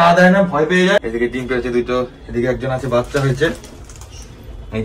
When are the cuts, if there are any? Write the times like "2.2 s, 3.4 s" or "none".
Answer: 1.0 s